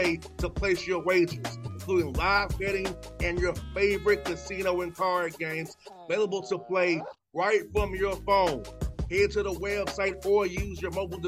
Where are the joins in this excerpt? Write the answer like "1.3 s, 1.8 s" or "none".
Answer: none